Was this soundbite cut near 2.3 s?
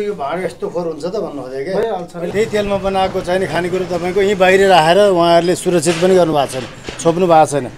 yes; 1 cut; at 2.3 s

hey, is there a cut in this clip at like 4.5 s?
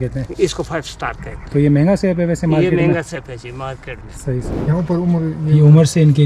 yes; 1 cut; at 4.5 s

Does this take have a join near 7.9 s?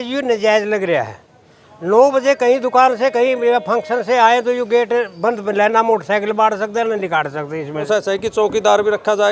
yes; 1 cut; at 7.9 s

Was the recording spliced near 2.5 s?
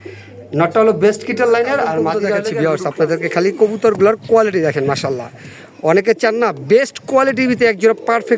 yes; 1 cut; at 2.5 s

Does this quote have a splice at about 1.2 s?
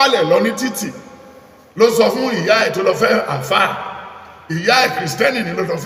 no; 0 cuts

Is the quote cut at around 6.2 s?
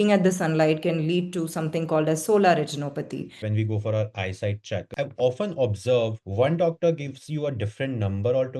yes; 3 cuts; at 3.4 s, 4.9 s, 6.2 s

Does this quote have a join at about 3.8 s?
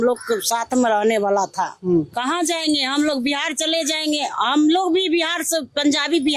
no; 1 cut; at 2.1 s

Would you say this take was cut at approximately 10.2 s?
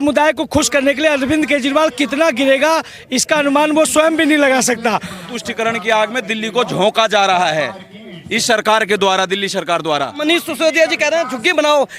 yes; 2 cuts; at 5.3 s, 10.2 s

